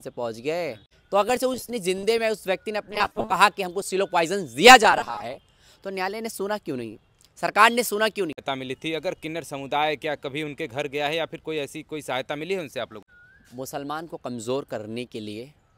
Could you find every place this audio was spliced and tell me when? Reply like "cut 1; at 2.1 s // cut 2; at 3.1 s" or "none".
cut 1; at 0.9 s // cut 2; at 8.5 s // cut 3; at 13.0 s